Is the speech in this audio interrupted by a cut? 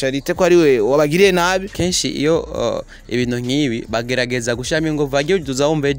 yes; 1 cut; at 1.7 s

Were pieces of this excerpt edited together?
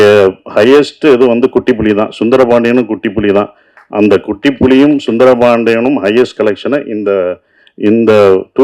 no; 0 cuts

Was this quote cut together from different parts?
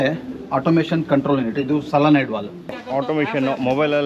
yes; 1 cut; at 2.8 s

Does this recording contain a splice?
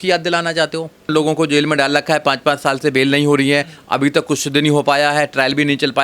yes; 1 cut; at 1.1 s

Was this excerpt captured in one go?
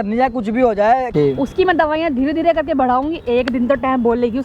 no; 1 cut; at 1.1 s

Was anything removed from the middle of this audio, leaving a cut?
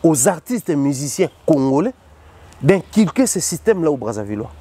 no; 0 cuts

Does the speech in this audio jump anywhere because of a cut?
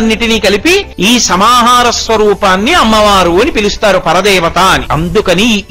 yes; 2 cuts; at 0.9 s, 4.9 s

